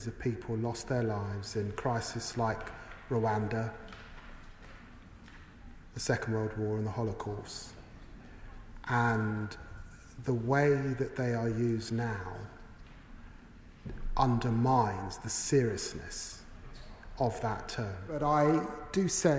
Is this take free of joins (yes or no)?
no